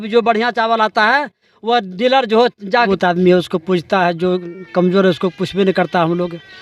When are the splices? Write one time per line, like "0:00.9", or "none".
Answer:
0:02.9